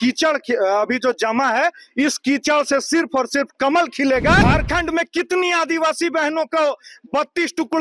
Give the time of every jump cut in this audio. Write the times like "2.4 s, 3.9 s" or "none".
4.4 s